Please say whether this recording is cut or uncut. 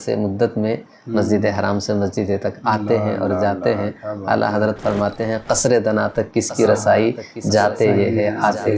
uncut